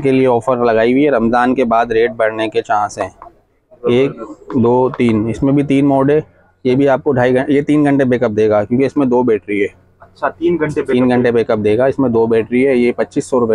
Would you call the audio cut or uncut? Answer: uncut